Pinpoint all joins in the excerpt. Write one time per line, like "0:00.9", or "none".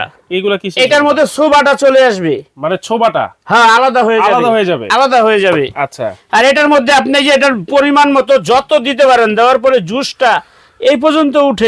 none